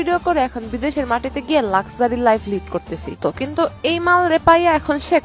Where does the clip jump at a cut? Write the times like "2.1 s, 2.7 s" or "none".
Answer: 3.2 s

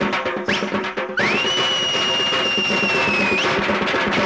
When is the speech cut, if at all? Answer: none

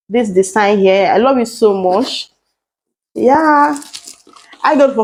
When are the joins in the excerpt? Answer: none

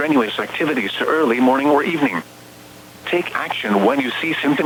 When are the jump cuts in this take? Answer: none

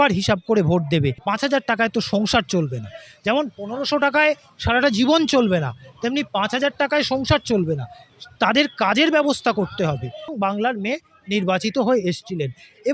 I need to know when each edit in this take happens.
1.2 s, 10.3 s

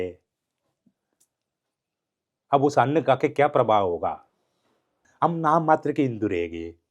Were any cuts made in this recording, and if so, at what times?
5.0 s

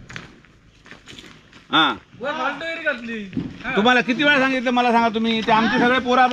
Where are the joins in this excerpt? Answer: none

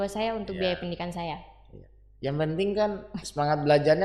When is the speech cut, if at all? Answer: none

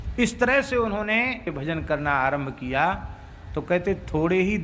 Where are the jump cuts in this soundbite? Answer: 1.5 s

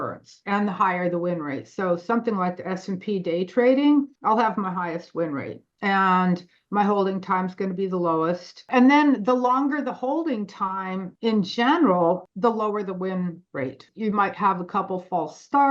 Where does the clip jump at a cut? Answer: 4.1 s, 8.6 s, 11.1 s, 12.2 s, 13.9 s

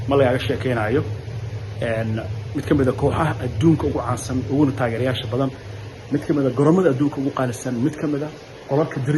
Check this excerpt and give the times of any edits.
none

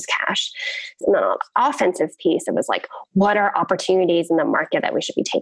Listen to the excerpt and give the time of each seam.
1.0 s

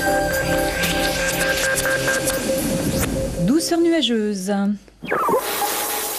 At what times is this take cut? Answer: 1.8 s

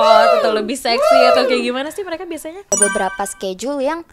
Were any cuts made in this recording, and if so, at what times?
2.7 s

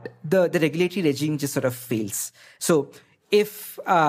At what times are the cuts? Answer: 2.5 s

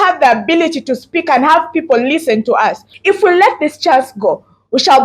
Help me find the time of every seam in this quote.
2.9 s

